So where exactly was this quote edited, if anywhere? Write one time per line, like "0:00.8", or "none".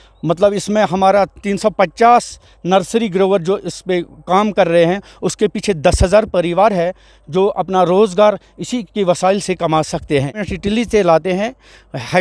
0:10.5